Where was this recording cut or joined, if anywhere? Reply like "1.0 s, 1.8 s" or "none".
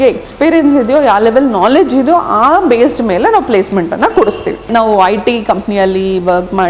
4.7 s

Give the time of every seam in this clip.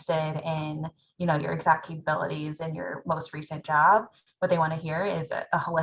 4.2 s

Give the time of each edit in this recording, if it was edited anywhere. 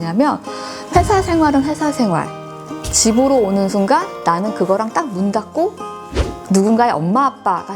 none

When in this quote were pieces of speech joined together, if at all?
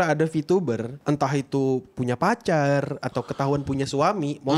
0.9 s

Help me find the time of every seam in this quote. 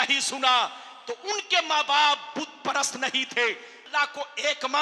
3.7 s

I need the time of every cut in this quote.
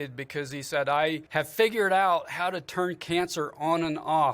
1.2 s

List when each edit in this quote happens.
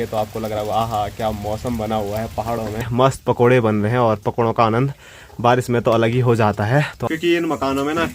2.9 s, 7.0 s

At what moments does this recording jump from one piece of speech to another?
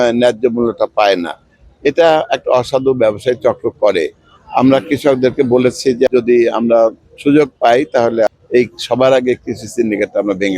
6.1 s, 8.3 s

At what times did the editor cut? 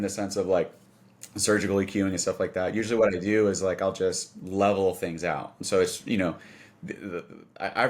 none

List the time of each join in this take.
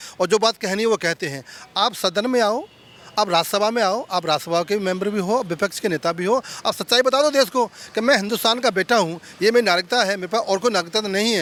none

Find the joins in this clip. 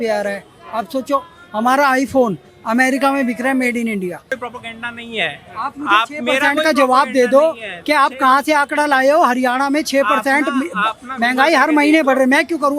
4.3 s

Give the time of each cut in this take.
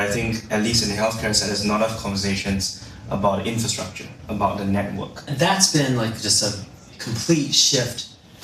5.3 s

